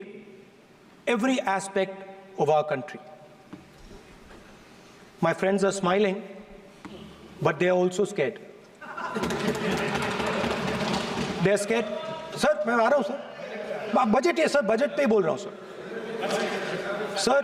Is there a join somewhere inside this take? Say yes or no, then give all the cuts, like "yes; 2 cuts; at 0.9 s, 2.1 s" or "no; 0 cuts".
no; 0 cuts